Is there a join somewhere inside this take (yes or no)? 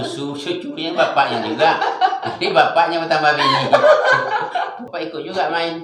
yes